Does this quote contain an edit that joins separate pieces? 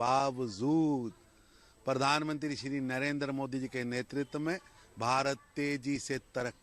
no; 0 cuts

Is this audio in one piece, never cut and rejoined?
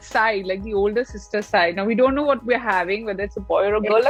yes; 0 cuts

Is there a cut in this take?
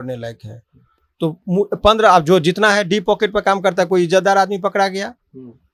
no; 0 cuts

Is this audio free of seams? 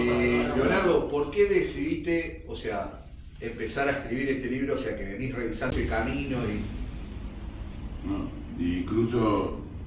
no; 1 cut; at 5.7 s

